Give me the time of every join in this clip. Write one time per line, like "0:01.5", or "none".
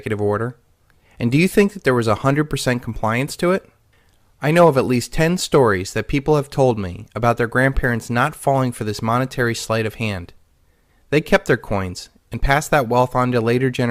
0:03.5